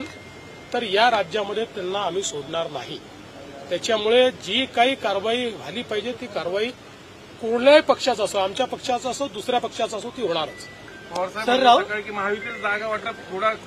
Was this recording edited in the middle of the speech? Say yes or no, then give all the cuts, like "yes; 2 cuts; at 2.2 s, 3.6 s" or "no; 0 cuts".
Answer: no; 0 cuts